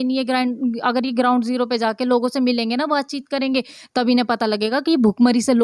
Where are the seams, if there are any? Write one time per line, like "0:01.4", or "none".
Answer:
none